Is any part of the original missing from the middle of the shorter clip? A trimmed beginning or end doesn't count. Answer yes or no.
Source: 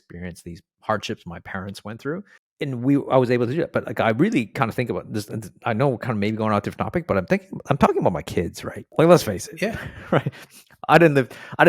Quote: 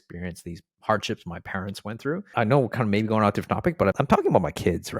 yes